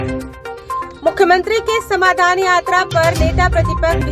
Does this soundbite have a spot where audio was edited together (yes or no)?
yes